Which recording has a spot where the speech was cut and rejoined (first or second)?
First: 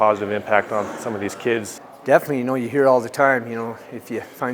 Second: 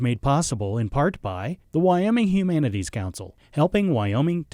first